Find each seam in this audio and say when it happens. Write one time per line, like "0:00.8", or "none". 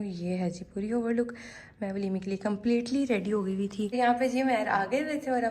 0:03.9